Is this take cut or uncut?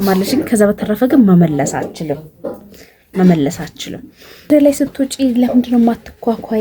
cut